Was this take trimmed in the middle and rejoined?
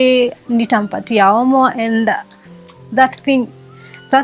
no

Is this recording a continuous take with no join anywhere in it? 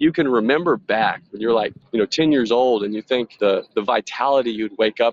no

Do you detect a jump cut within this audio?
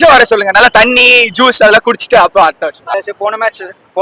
yes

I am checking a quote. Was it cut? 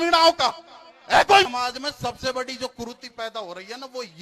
yes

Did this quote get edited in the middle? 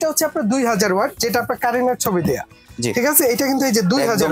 no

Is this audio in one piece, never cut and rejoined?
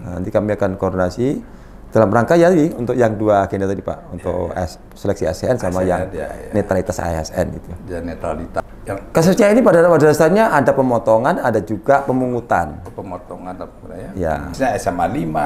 no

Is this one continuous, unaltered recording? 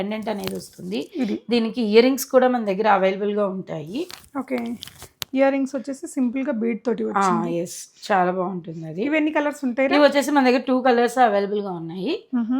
yes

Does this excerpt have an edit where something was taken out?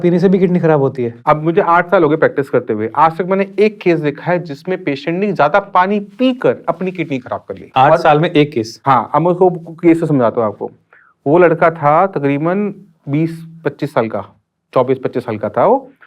yes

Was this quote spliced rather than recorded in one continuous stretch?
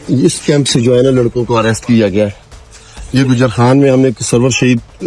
no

